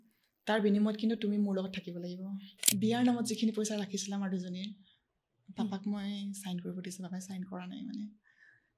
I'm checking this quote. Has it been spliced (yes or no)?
yes